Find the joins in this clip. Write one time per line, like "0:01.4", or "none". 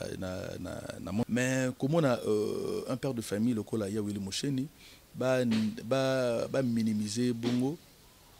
0:01.2